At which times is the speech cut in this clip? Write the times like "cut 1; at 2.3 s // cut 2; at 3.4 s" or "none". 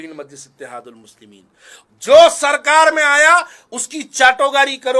cut 1; at 1.8 s